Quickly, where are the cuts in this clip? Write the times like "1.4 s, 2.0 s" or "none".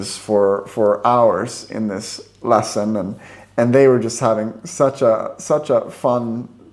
none